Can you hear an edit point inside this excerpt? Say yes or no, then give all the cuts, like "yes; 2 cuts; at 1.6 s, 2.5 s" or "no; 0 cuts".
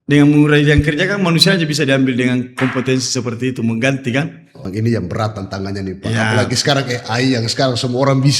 yes; 1 cut; at 4.7 s